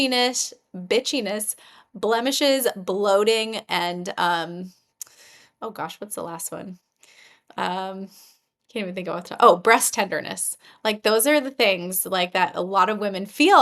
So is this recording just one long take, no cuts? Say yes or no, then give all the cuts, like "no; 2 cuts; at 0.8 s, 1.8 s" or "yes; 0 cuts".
yes; 0 cuts